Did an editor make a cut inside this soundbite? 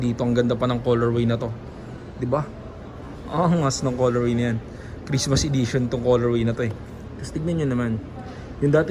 no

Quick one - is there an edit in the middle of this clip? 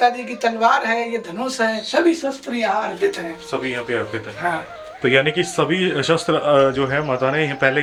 no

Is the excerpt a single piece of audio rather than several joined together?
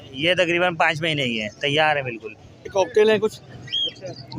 no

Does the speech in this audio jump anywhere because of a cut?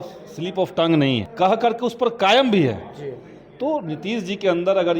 yes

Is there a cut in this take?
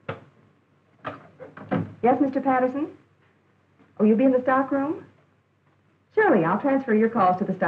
no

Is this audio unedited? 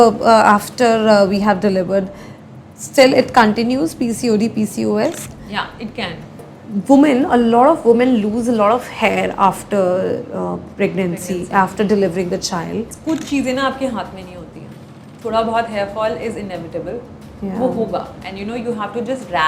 no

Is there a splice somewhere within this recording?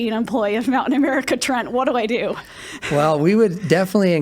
no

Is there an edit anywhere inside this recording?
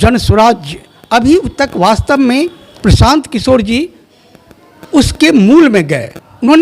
yes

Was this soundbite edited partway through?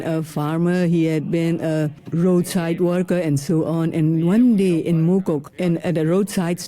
yes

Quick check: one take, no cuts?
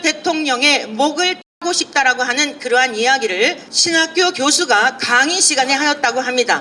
yes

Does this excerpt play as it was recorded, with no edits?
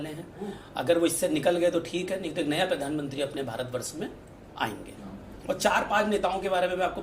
no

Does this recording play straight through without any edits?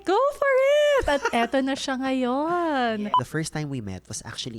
no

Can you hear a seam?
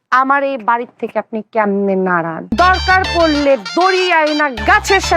yes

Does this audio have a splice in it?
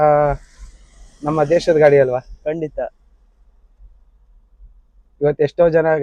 no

